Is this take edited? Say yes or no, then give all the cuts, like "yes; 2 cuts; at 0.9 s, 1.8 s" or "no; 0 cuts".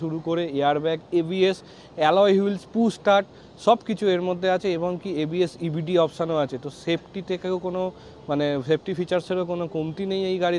no; 0 cuts